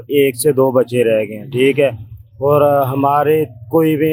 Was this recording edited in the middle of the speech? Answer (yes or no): no